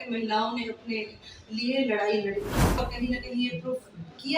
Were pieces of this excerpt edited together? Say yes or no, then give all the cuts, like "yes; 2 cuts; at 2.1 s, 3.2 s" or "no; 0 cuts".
yes; 1 cut; at 2.9 s